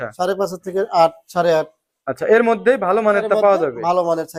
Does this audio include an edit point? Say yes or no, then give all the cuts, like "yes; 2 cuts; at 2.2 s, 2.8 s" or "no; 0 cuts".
no; 0 cuts